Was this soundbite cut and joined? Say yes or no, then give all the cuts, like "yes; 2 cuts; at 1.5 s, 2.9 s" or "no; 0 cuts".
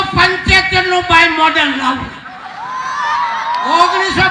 no; 0 cuts